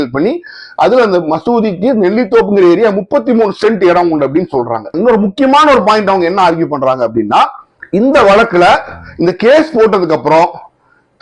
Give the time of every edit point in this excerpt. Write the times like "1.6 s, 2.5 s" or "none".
4.9 s

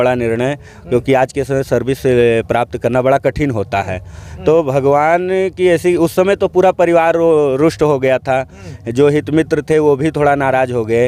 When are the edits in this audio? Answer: none

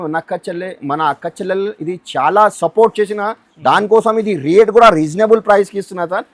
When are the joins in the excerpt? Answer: none

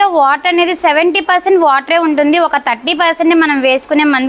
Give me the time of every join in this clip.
none

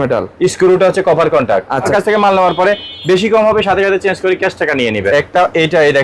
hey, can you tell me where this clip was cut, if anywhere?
1.9 s, 5.1 s

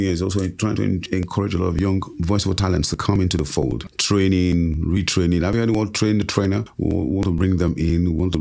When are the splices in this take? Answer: 2.1 s, 3.9 s, 6.7 s

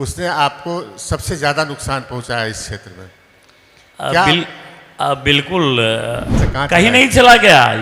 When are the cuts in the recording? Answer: 6.4 s

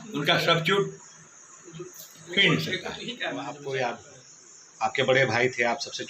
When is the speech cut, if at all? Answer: none

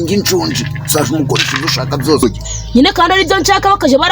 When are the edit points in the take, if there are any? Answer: 2.2 s

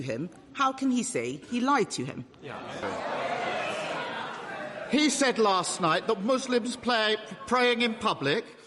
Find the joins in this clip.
2.8 s

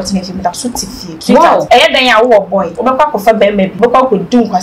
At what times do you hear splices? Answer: 1.5 s, 2.7 s, 3.7 s

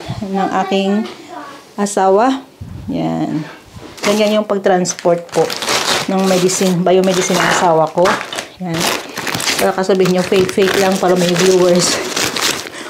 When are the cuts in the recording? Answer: 3.9 s

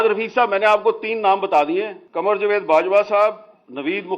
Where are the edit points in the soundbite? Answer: 2.0 s

